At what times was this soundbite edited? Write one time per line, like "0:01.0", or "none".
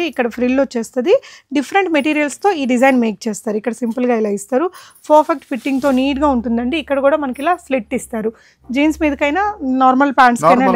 none